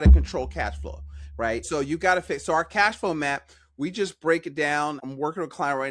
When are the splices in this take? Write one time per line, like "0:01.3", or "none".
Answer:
0:01.6
0:05.0